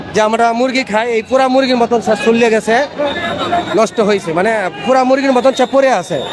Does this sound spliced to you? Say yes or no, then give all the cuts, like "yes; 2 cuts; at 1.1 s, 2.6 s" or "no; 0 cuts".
no; 0 cuts